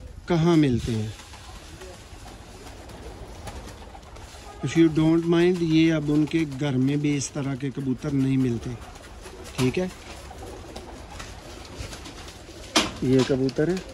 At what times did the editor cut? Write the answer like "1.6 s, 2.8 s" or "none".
none